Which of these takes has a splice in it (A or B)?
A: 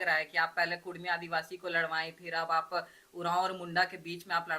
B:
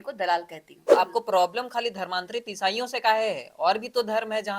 B